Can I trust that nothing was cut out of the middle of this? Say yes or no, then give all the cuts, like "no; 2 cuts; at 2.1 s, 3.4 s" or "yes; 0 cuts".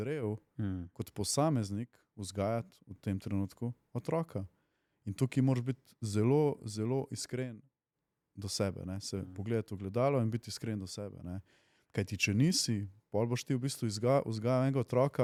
yes; 0 cuts